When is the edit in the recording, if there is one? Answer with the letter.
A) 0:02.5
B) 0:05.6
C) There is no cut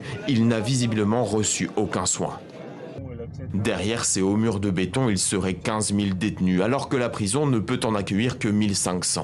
A